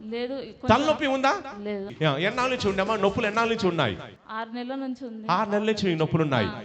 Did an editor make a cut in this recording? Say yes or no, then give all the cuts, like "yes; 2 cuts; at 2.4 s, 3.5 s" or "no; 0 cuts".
yes; 2 cuts; at 1.9 s, 4.2 s